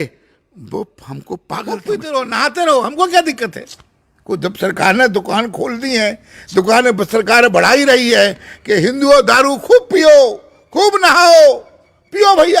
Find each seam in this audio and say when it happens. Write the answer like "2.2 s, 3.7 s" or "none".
1.7 s